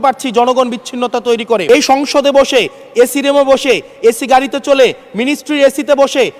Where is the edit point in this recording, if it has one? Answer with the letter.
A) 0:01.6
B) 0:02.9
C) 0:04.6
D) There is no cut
A